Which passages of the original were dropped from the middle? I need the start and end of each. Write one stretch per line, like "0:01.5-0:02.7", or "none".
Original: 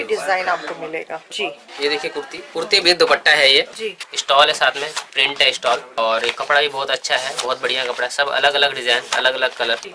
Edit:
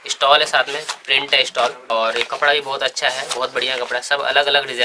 none

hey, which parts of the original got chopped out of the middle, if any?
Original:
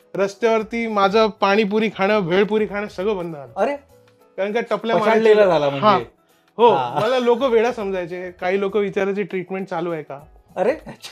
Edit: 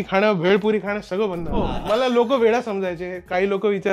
0:03.6-0:06.8

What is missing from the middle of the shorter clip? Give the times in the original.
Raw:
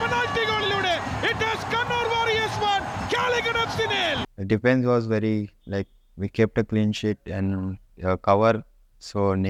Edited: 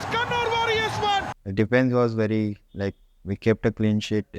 0:03.0-0:04.3

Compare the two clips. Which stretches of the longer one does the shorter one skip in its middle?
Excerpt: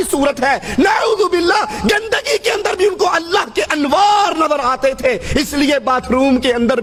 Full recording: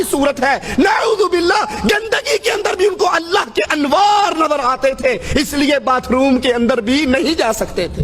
none

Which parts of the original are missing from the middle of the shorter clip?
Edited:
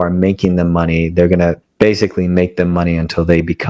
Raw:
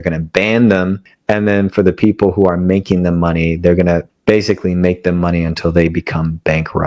none

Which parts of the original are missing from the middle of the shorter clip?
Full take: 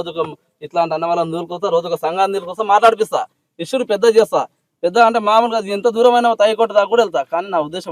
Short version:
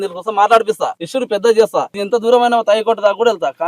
0:03.3-0:03.6
0:04.6-0:05.7

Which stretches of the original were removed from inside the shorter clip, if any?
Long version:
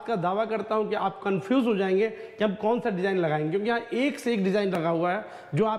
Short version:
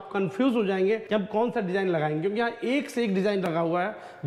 0:02.1-0:02.3

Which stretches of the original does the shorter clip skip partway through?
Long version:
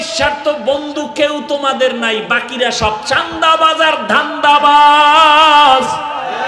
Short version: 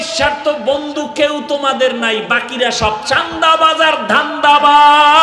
none

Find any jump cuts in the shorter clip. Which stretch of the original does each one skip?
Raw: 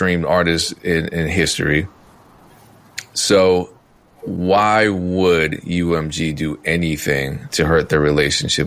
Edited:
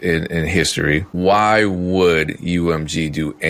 0:01.9-0:04.3

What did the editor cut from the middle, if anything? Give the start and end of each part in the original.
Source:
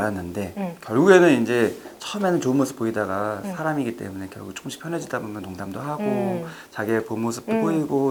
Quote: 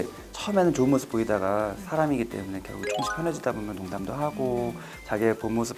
none

